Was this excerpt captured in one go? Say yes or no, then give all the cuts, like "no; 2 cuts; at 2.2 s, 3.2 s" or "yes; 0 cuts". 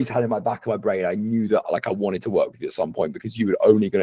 yes; 0 cuts